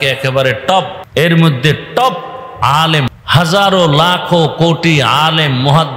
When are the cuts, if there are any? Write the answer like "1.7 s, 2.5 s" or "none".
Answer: 1.0 s, 3.1 s